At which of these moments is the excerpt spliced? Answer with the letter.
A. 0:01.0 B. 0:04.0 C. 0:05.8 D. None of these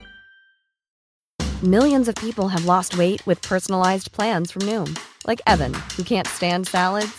A